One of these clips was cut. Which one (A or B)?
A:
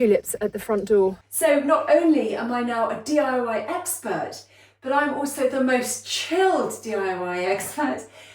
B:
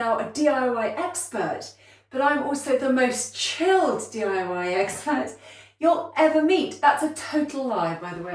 A